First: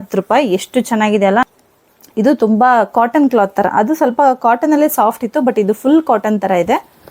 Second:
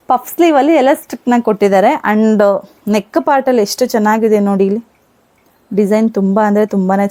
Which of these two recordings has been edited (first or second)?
first